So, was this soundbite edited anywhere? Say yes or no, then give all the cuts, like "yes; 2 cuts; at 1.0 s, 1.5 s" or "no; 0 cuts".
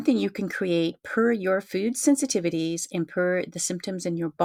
no; 0 cuts